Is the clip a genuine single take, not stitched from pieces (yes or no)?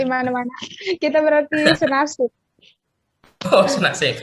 yes